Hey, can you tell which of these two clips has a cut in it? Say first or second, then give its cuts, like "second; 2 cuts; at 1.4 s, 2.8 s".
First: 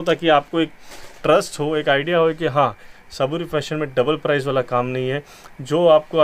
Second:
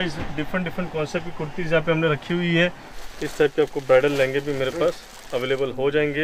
second; 1 cut; at 2.9 s